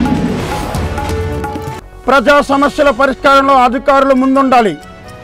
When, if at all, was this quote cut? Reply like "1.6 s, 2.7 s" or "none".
1.7 s